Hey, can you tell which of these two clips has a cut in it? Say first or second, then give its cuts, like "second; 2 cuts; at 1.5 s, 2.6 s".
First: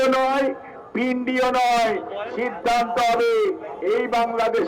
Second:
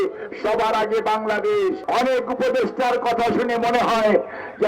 second; 1 cut; at 1.8 s